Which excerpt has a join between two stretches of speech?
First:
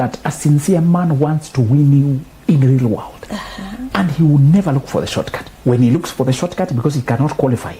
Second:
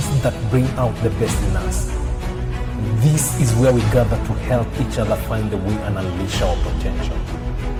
first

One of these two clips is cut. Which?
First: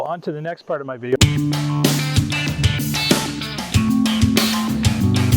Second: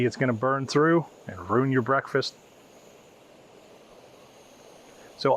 first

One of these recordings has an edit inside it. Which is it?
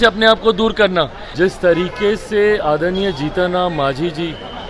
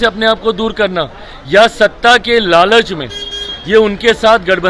first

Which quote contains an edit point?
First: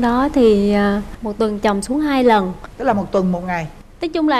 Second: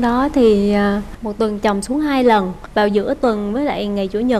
first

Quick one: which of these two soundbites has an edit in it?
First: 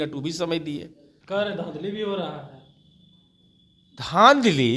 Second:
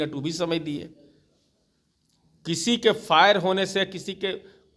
first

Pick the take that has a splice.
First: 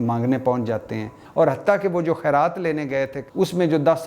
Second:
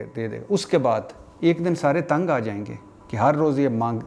first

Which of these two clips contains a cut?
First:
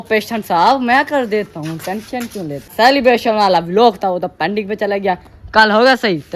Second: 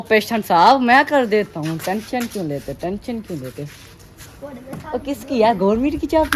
first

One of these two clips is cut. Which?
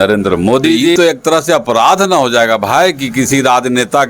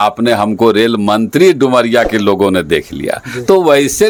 first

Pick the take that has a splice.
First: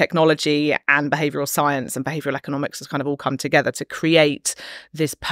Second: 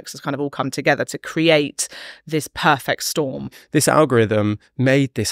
second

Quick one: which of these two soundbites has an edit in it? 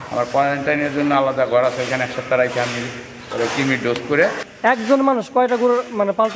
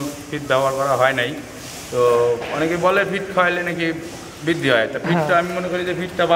first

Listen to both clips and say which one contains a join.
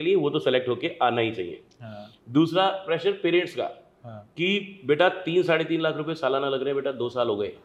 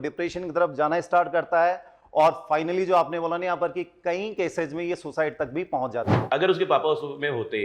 second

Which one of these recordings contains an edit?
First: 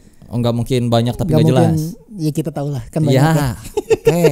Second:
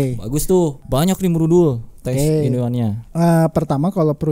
second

